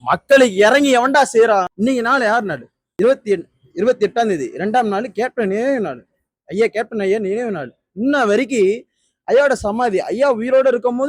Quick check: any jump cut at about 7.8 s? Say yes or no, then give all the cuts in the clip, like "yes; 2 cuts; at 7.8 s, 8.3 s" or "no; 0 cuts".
no; 2 cuts; at 1.7 s, 2.8 s